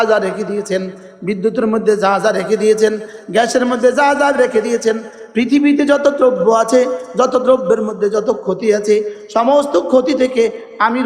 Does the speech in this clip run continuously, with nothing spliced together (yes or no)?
yes